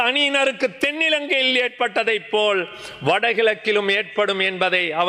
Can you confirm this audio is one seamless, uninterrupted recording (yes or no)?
yes